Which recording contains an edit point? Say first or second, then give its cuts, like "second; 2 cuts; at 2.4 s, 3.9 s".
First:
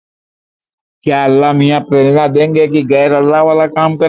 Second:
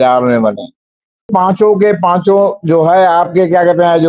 second; 1 cut; at 1.3 s